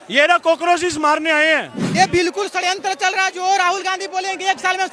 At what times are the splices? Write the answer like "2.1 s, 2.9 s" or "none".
1.8 s